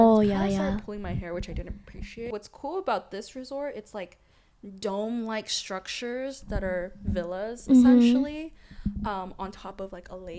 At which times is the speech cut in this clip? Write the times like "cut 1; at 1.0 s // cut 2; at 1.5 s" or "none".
cut 1; at 2.3 s